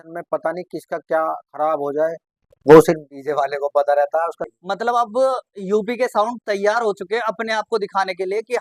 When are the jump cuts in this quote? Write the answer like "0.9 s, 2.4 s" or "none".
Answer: 4.4 s